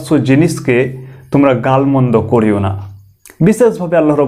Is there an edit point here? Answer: no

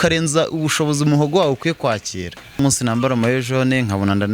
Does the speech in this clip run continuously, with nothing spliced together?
no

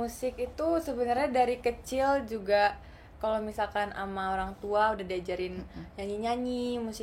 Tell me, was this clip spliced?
no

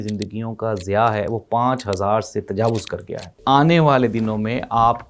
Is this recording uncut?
no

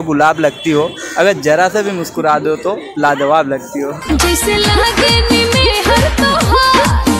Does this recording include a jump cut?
no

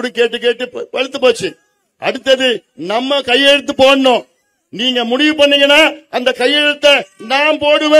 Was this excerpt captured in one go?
yes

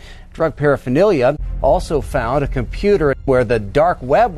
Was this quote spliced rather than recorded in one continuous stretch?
yes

